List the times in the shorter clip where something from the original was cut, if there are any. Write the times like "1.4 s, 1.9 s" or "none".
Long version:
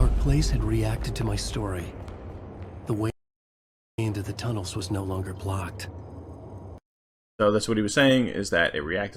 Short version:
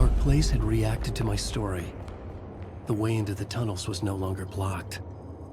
3.1 s